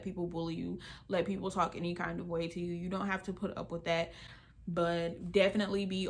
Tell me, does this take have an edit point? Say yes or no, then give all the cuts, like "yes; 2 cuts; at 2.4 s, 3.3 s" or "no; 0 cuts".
no; 0 cuts